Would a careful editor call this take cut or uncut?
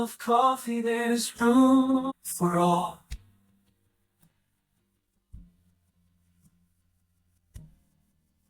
cut